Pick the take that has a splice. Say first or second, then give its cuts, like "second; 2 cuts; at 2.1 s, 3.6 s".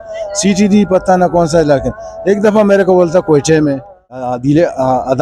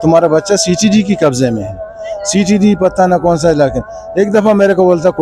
first; 1 cut; at 4.3 s